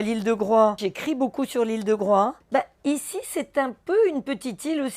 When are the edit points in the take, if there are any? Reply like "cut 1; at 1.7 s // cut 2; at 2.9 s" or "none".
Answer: cut 1; at 0.9 s // cut 2; at 2.4 s